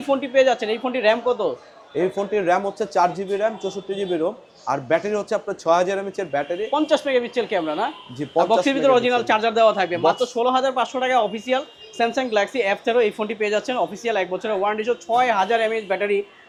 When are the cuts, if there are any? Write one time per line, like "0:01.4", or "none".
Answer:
none